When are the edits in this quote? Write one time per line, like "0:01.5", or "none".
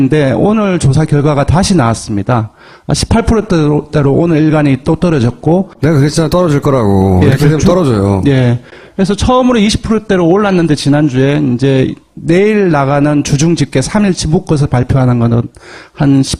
none